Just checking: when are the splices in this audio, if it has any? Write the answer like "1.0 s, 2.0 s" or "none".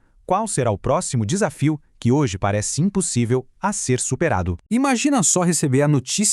4.6 s

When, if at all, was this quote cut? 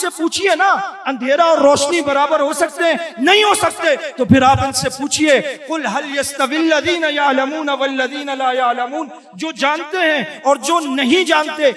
none

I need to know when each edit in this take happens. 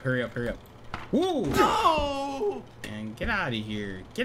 2.8 s

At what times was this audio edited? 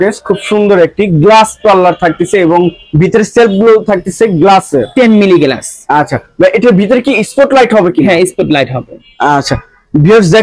none

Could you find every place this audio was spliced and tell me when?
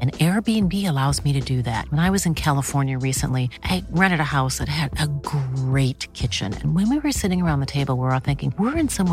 none

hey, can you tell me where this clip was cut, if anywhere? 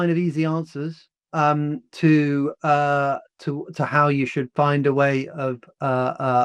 none

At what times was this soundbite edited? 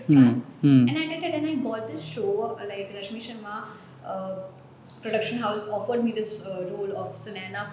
none

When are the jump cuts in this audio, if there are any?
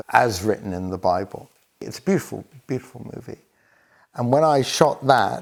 none

